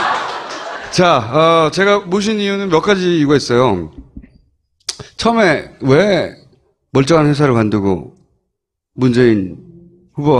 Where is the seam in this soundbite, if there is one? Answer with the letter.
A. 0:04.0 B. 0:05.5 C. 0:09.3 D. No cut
D